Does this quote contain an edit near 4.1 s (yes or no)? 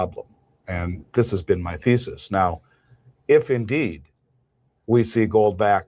no